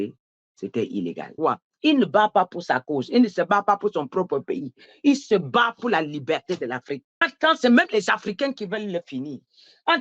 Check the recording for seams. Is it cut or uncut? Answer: cut